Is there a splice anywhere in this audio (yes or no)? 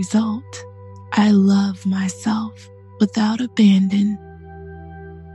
yes